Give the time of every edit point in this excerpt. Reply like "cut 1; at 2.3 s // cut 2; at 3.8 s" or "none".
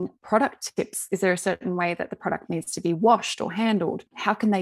cut 1; at 1.0 s